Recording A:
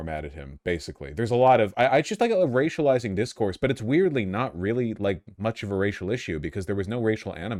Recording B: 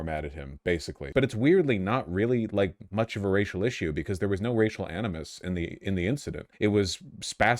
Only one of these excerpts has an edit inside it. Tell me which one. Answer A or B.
B